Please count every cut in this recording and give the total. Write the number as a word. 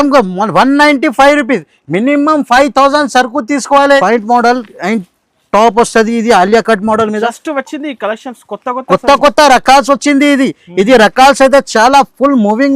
one